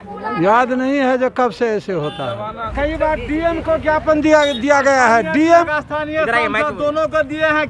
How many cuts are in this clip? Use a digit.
2